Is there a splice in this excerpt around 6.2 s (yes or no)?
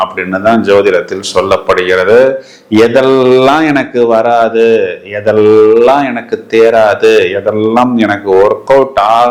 no